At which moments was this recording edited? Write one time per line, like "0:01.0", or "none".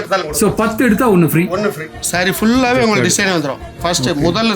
0:01.9